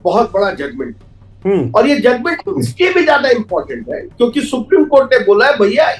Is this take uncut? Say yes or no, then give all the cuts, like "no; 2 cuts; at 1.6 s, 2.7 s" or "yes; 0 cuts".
yes; 0 cuts